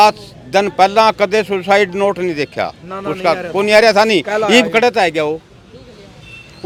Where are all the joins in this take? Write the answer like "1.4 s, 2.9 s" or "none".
none